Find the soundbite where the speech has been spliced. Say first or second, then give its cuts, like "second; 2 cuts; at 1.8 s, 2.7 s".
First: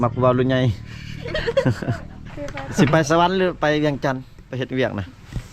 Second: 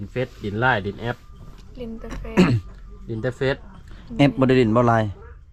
first; 1 cut; at 2.4 s